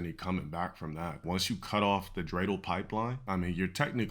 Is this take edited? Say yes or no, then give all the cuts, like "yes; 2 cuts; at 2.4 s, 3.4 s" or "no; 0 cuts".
yes; 2 cuts; at 1.2 s, 3.2 s